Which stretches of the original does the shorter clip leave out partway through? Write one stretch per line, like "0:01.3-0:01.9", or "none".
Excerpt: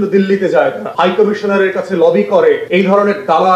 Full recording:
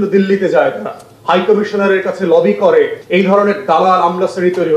0:00.9-0:01.2
0:03.0-0:03.1